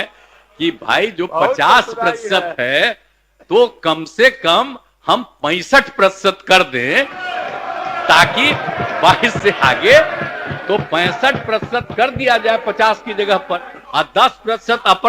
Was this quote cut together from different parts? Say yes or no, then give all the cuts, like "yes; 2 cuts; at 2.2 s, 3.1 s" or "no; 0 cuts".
yes; 1 cut; at 13.8 s